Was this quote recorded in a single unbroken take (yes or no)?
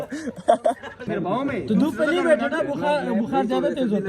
no